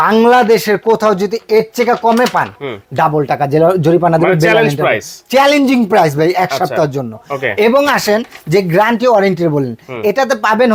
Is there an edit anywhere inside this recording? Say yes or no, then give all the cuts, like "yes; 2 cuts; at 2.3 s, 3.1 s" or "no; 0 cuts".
no; 0 cuts